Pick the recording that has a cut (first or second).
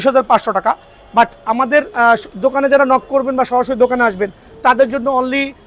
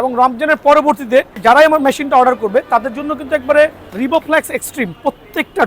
second